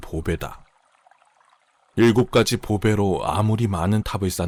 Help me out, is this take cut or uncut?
uncut